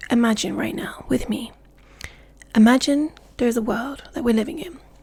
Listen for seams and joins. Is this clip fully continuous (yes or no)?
yes